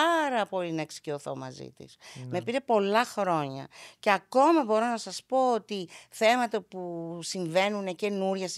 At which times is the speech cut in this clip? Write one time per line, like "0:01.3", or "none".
none